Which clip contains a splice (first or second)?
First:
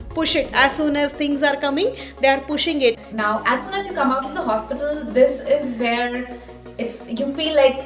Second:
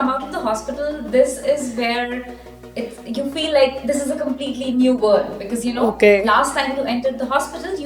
first